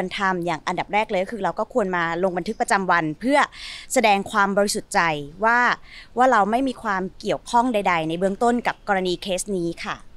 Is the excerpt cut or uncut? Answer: uncut